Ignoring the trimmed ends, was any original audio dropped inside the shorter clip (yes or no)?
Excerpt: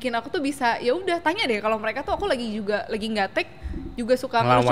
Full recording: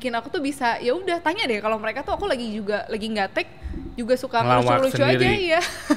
no